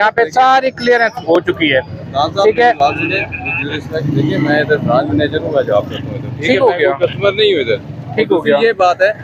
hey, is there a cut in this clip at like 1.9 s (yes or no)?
no